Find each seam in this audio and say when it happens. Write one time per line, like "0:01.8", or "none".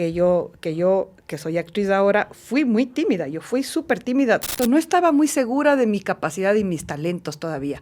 0:04.5